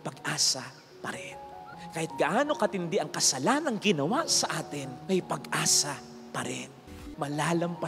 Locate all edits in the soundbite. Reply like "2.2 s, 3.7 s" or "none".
6.8 s